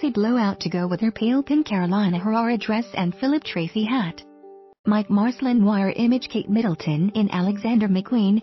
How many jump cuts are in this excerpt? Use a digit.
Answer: 2